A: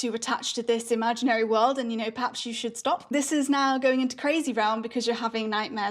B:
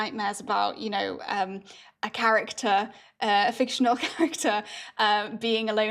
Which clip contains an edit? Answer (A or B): A